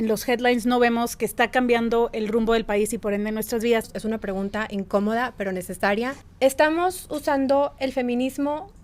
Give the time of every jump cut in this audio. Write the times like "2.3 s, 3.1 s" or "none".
3.9 s, 6.2 s